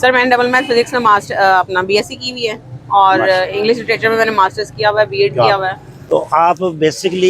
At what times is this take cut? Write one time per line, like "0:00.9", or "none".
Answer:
0:05.9